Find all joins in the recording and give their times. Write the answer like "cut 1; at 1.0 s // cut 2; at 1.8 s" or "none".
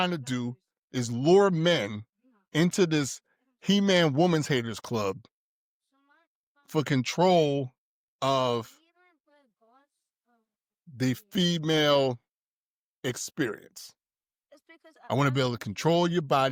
none